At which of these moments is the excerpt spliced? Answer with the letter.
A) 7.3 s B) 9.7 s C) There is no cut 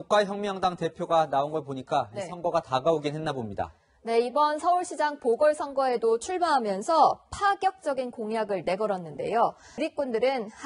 B